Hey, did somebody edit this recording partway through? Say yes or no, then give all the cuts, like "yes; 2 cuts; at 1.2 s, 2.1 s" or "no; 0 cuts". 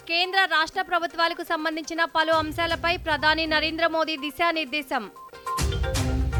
no; 0 cuts